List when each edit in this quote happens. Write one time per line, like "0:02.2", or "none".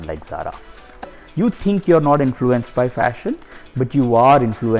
0:01.1